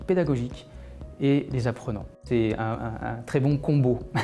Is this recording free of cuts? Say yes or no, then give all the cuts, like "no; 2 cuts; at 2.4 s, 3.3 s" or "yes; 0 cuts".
no; 1 cut; at 2.2 s